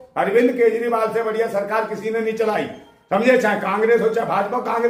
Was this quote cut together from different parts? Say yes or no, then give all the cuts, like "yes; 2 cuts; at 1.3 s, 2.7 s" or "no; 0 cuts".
no; 0 cuts